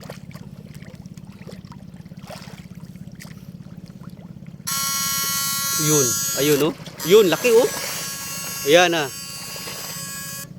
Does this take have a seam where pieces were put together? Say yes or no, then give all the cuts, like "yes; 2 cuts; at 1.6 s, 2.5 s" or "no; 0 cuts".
no; 0 cuts